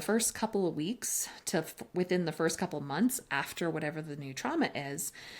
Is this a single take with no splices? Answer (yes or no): yes